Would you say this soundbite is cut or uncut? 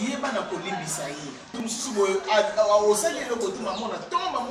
cut